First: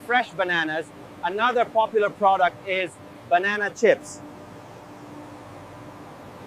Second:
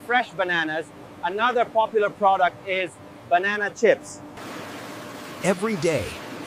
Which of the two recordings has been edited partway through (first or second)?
second